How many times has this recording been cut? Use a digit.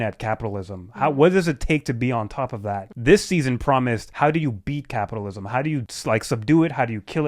3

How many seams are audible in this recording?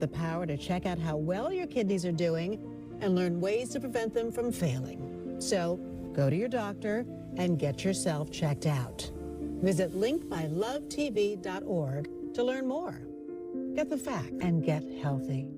1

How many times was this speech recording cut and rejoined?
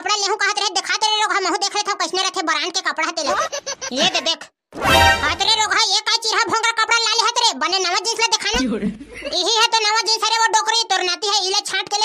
0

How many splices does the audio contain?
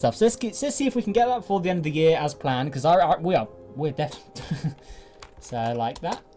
0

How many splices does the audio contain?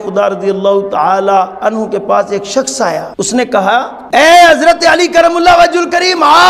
2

